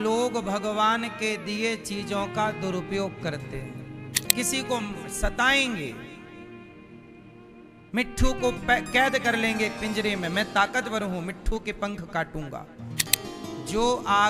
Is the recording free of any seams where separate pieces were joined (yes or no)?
no